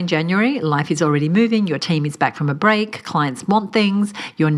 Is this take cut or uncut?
uncut